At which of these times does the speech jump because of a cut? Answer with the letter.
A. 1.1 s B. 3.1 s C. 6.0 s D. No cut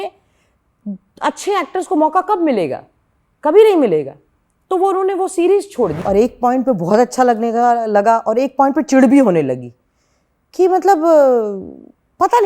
C